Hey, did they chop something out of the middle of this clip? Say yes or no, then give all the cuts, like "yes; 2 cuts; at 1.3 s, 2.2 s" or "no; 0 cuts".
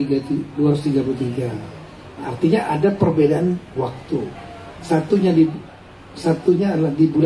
no; 0 cuts